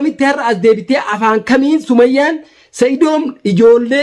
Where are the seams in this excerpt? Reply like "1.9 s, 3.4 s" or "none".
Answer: none